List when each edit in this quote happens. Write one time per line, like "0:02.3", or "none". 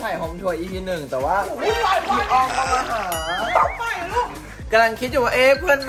0:04.6